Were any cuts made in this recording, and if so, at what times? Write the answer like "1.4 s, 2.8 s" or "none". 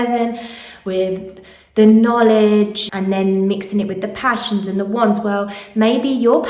none